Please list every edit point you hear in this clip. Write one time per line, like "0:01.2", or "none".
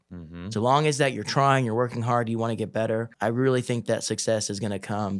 0:03.1